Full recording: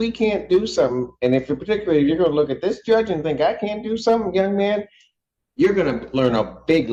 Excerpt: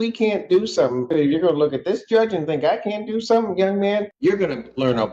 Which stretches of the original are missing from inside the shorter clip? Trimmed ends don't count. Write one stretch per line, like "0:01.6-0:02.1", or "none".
0:01.1-0:01.9
0:04.9-0:05.5

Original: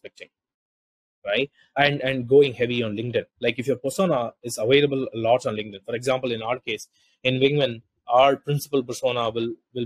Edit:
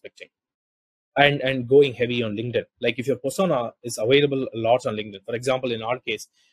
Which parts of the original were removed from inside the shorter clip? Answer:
0:01.0-0:01.6

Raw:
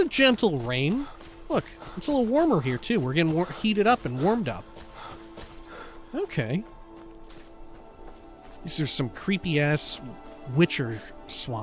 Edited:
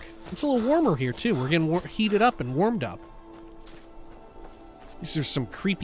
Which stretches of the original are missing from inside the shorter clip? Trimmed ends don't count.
0:04.7-0:06.7

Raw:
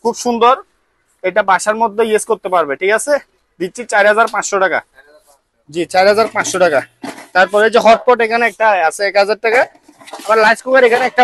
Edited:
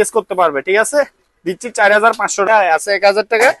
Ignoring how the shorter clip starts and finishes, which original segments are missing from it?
0:04.6-0:08.6

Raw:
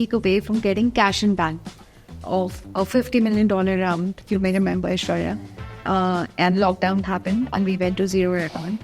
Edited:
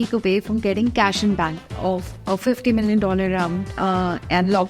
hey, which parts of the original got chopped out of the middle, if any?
0:01.6-0:02.1
0:04.1-0:05.7

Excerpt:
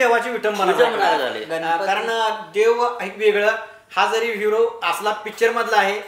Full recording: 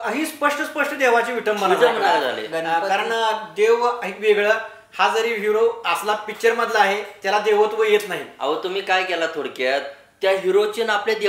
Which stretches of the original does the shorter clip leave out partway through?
none

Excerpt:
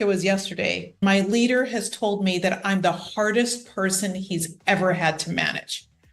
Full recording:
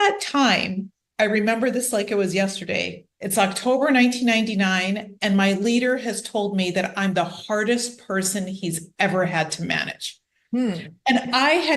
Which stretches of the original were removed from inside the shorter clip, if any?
0:03.1-0:05.3

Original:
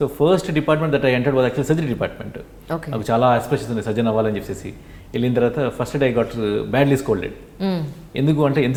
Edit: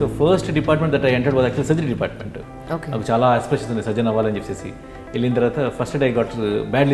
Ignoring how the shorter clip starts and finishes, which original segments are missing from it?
none

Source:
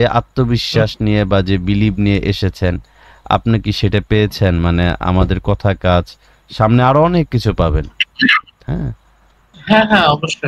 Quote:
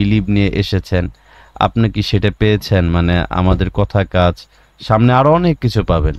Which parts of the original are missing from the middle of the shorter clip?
none

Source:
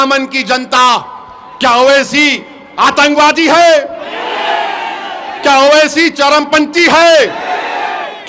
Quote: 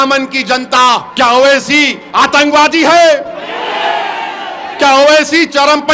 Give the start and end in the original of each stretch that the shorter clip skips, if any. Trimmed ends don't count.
0:01.1-0:01.5
0:02.4-0:02.6

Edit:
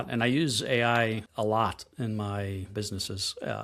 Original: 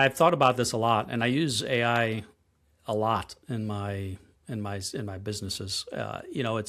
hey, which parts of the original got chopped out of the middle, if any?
0:02.3-0:02.8
0:04.2-0:05.2

